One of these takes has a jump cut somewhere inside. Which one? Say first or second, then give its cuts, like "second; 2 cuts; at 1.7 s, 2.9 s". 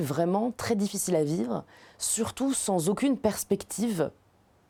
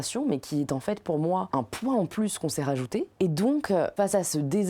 second; 3 cuts; at 1.5 s, 3.1 s, 3.9 s